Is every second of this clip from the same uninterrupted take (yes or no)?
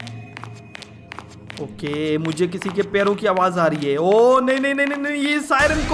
yes